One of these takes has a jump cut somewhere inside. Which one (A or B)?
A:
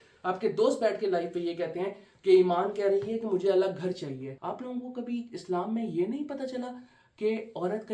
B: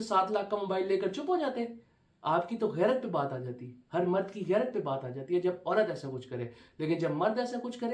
A